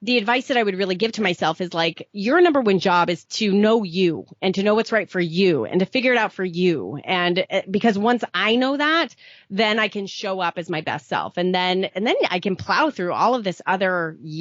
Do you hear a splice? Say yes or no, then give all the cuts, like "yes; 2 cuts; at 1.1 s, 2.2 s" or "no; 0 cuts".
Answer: yes; 1 cut; at 3.2 s